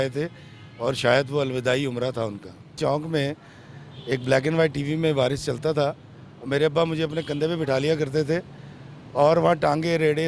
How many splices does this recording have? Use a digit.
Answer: 1